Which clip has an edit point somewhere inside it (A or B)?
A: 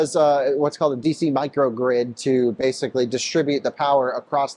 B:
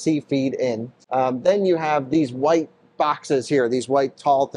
B